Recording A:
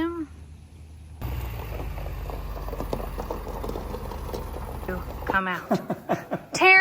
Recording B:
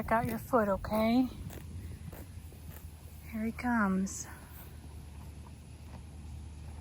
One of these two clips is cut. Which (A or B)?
A